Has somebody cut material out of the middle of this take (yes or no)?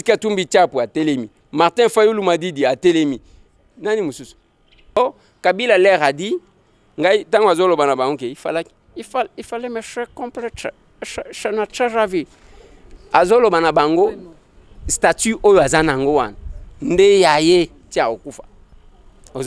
yes